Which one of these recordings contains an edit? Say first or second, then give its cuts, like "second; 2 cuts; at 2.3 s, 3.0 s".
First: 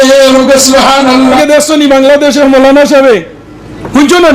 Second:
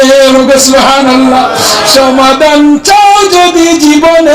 first; 1 cut; at 1.4 s